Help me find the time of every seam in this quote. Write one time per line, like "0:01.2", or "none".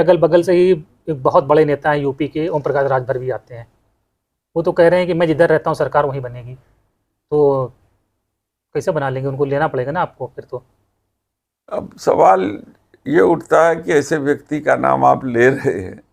none

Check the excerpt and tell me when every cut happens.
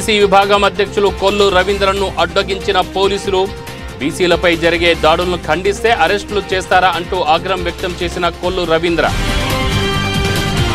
0:09.1

